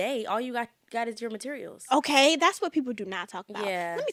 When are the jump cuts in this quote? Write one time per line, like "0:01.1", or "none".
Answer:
none